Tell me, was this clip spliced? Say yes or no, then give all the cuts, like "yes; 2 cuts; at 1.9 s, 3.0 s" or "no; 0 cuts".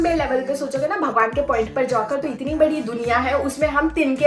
no; 0 cuts